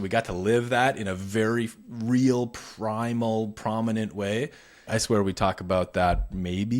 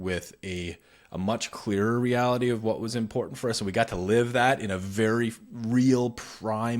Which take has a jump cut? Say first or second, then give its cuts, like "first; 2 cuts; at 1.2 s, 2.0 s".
first; 1 cut; at 4.9 s